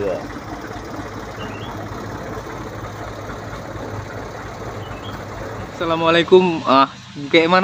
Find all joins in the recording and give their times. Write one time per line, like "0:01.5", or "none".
0:05.7